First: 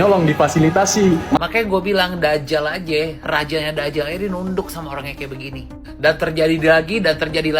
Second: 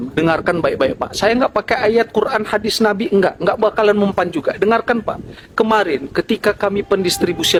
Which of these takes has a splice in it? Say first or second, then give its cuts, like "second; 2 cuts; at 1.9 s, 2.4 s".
first; 1 cut; at 1.4 s